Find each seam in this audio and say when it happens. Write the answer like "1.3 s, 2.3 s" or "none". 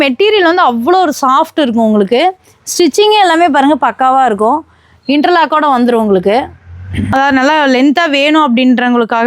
7.1 s